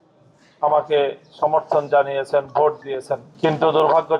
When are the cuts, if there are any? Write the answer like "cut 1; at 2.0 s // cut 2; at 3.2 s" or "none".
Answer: cut 1; at 3.3 s